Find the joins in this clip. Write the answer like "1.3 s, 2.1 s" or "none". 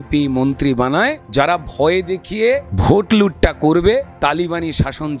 1.2 s, 2.7 s